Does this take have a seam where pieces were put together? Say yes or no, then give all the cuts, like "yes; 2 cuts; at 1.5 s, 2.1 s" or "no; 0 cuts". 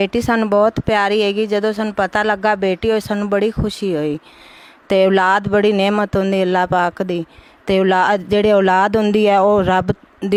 no; 0 cuts